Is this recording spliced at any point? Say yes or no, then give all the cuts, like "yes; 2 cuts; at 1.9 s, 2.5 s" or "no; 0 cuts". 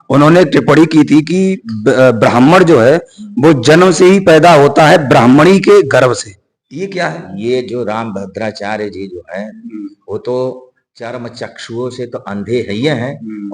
no; 0 cuts